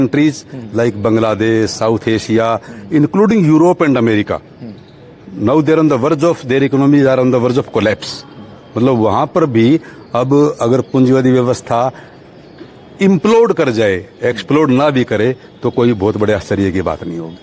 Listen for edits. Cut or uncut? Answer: uncut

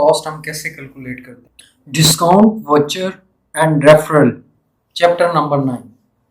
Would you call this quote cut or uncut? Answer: cut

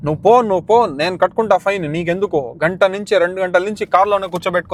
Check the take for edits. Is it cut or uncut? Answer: uncut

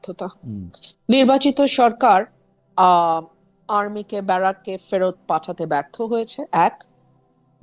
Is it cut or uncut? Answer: uncut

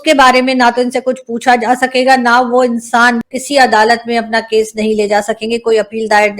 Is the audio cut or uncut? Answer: cut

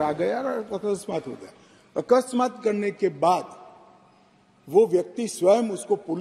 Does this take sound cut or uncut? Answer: uncut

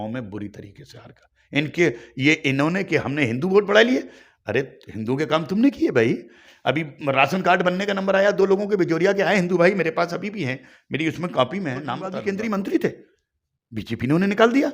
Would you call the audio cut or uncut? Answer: cut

